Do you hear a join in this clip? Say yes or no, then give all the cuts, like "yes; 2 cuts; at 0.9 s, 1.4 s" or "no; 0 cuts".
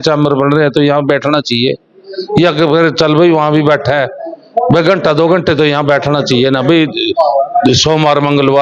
no; 0 cuts